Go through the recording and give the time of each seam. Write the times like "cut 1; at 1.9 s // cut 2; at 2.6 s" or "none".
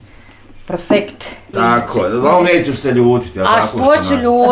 cut 1; at 1.5 s